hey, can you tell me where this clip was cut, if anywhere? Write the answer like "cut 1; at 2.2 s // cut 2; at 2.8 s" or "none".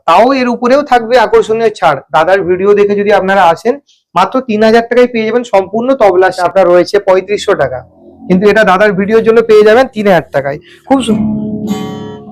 cut 1; at 6.4 s